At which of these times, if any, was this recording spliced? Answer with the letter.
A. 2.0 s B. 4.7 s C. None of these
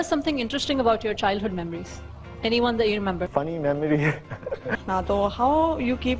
B